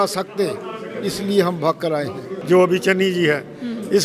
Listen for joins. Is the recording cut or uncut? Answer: cut